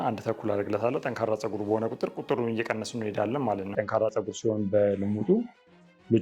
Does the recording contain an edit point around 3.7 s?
yes; 1 cut; at 3.7 s

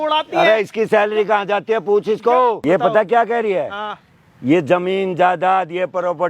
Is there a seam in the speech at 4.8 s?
no; 1 cut; at 2.6 s

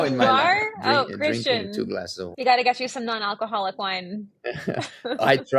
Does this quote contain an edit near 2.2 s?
yes; 1 cut; at 2.2 s

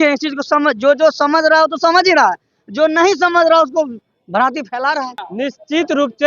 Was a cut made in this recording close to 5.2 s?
yes; 1 cut; at 5.2 s

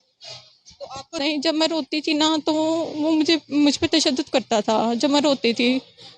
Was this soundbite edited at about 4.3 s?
no; 1 cut; at 1.1 s

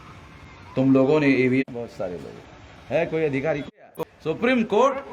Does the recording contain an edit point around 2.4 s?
no; 1 cut; at 4.1 s

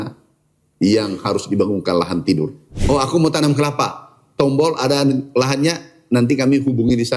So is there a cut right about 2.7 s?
yes; 1 cut; at 2.7 s

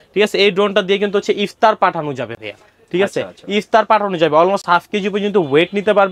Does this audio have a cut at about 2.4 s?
no; 0 cuts

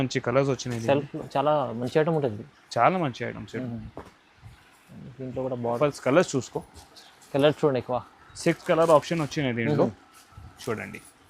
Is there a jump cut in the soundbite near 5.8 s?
yes; 1 cut; at 5.8 s

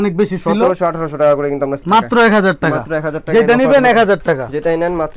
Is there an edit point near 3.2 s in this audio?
no; 1 cut; at 1.8 s

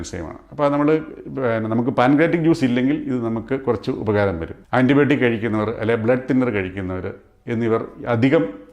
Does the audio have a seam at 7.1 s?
no; 1 cut; at 4.5 s

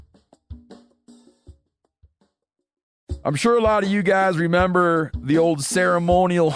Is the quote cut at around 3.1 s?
yes; 1 cut; at 3.1 s

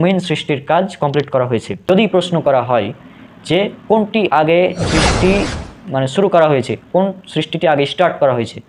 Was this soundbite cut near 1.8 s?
yes; 1 cut; at 1.8 s

